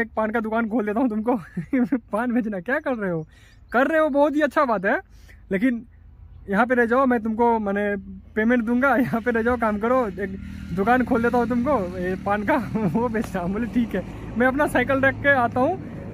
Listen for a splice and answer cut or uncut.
uncut